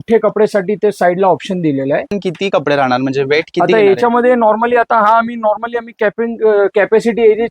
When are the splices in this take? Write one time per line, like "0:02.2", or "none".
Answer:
0:02.2